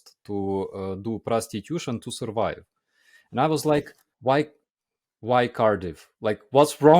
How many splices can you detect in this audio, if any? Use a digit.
1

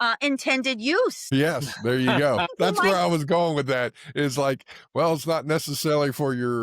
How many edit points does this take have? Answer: 2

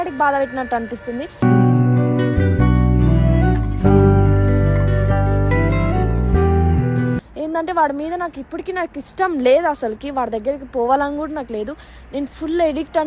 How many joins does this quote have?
1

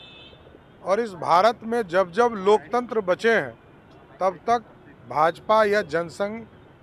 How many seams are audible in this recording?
0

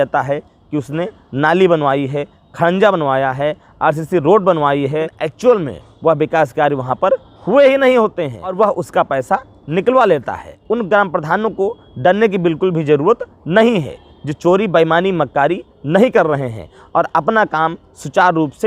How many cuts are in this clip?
3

